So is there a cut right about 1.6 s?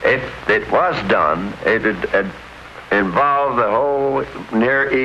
no; 0 cuts

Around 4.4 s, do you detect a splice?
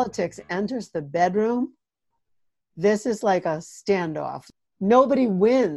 yes; 1 cut; at 4.4 s

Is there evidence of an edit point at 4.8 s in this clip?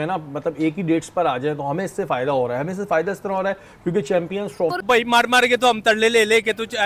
yes; 1 cut; at 4.8 s

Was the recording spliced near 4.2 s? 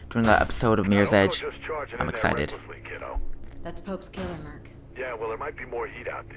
no; 1 cut; at 1.4 s

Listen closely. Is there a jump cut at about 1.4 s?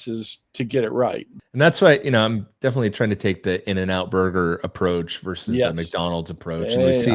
yes; 1 cut; at 1.4 s

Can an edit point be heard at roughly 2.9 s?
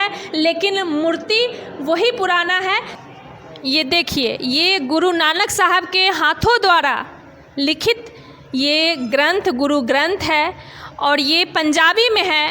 yes; 1 cut; at 2.9 s

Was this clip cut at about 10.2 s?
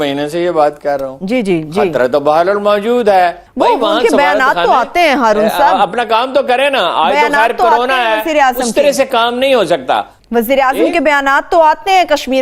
yes; 2 cuts; at 3.4 s, 10.2 s

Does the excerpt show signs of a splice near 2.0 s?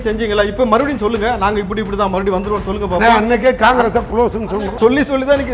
no; 1 cut; at 4.6 s

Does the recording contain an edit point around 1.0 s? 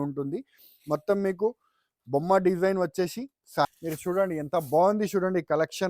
no; 1 cut; at 3.6 s

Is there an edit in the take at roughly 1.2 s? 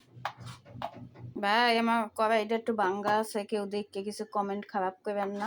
yes; 1 cut; at 1.2 s

